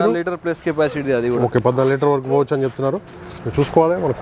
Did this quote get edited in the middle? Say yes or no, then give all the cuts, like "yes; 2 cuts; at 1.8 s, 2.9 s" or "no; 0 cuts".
no; 0 cuts